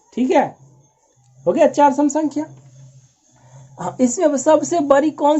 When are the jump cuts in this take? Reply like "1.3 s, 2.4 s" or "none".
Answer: none